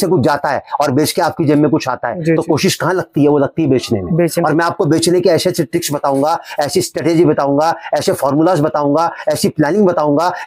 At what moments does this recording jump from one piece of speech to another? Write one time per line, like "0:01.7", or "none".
none

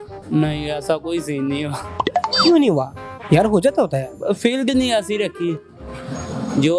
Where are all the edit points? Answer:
none

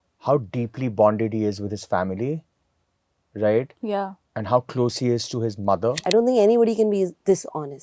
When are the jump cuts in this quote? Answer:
0:06.0

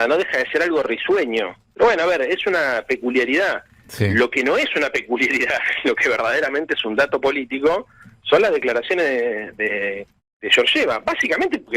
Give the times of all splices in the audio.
0:01.6

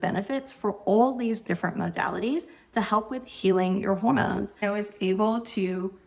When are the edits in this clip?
0:04.6

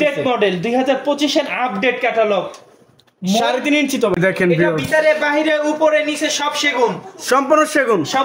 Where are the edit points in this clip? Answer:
0:04.1

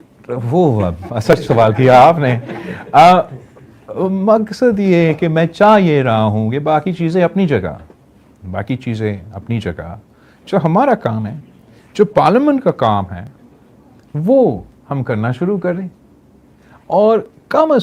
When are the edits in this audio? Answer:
none

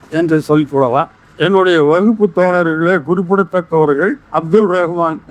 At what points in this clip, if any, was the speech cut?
0:01.2
0:04.2

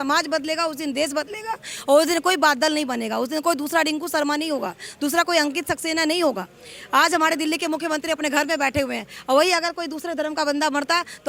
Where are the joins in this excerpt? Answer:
none

